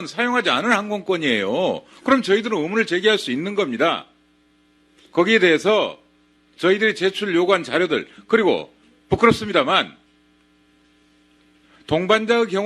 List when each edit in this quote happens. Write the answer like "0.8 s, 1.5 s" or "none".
6.2 s